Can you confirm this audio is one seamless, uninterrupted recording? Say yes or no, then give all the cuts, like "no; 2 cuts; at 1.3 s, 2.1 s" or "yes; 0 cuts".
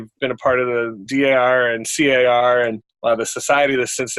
no; 1 cut; at 1.0 s